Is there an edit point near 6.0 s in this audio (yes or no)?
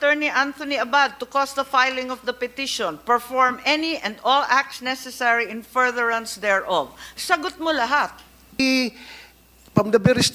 no